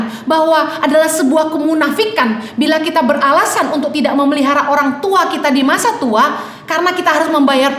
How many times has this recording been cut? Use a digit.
0